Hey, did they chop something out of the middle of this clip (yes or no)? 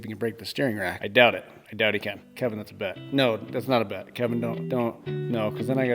yes